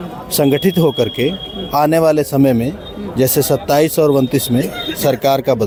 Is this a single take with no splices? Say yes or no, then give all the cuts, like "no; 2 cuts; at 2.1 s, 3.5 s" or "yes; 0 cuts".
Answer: yes; 0 cuts